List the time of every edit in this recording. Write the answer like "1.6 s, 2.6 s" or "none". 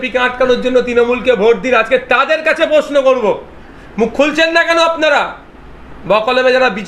none